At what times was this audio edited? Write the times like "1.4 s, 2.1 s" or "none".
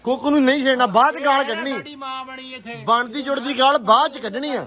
none